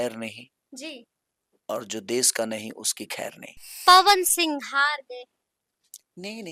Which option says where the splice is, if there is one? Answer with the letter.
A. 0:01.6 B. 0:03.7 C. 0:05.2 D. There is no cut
B